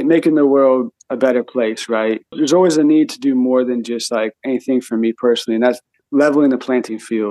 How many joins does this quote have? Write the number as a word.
three